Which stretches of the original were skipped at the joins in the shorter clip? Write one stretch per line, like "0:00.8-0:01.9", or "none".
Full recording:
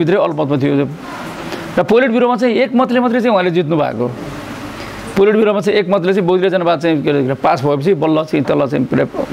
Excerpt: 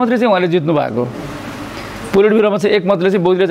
none